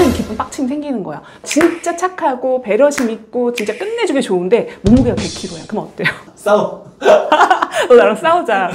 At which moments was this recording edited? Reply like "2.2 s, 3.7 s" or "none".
1.4 s